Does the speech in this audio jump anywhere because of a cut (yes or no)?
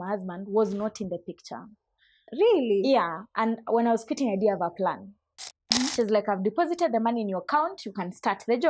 yes